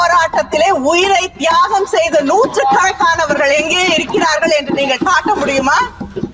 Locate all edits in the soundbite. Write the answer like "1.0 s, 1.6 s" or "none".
none